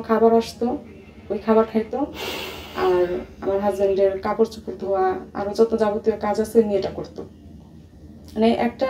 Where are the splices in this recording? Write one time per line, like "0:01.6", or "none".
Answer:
none